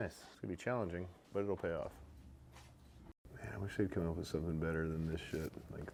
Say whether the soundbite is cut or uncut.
uncut